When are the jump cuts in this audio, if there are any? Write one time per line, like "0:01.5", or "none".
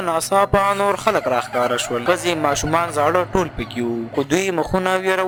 none